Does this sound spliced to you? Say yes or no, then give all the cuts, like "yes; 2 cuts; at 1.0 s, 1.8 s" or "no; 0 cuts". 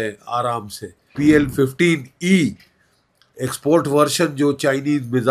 yes; 1 cut; at 1.1 s